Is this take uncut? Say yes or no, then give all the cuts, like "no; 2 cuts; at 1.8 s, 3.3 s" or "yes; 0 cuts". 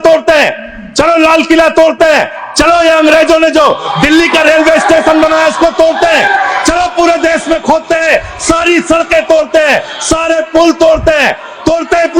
yes; 0 cuts